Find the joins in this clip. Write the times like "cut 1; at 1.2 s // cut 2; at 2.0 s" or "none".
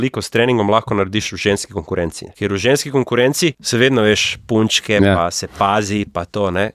cut 1; at 2.2 s // cut 2; at 3.6 s